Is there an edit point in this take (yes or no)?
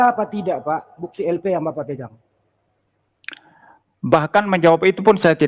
no